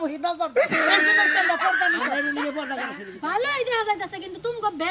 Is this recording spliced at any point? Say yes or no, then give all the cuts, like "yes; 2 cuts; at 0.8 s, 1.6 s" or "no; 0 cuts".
yes; 1 cut; at 3.1 s